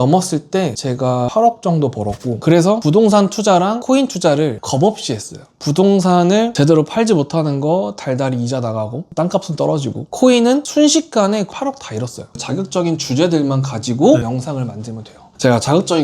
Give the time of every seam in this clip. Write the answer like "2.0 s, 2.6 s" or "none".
2.3 s, 12.4 s